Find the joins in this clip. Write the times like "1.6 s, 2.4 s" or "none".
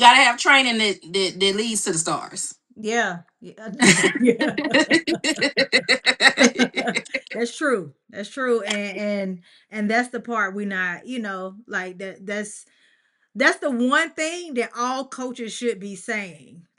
none